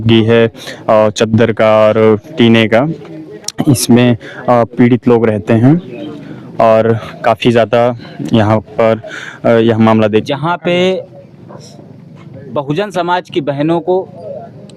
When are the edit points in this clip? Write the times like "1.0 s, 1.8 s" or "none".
10.0 s